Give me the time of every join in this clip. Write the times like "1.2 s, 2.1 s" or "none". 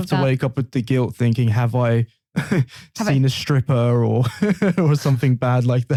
none